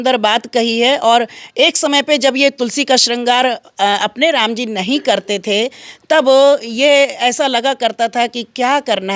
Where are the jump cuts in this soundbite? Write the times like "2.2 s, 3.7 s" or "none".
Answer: none